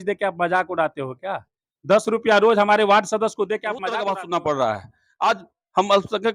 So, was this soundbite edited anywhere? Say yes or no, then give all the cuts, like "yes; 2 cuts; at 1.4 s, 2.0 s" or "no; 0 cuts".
yes; 1 cut; at 3.9 s